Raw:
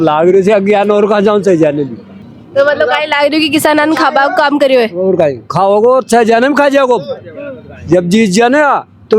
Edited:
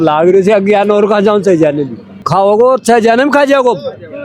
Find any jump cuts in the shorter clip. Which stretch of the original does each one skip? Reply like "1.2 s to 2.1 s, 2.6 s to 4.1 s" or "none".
2.2 s to 5.4 s